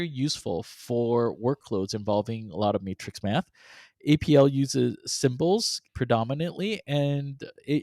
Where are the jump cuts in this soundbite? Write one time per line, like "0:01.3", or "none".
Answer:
0:05.9